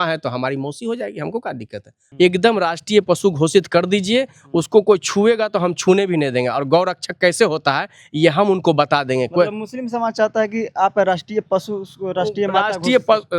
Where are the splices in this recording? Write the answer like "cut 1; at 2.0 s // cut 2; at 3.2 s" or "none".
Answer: cut 1; at 2.0 s